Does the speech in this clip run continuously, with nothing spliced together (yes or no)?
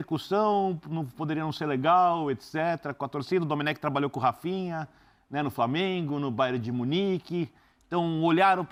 yes